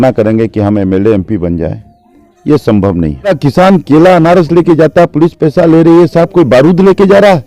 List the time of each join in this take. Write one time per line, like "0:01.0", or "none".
0:03.3